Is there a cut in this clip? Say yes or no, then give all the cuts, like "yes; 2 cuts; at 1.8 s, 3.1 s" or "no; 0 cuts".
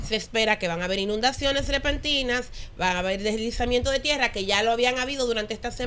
no; 0 cuts